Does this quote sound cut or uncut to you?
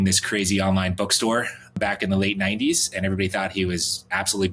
cut